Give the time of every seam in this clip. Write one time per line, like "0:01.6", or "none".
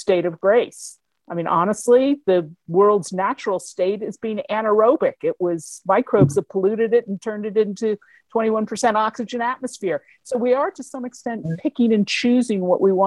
none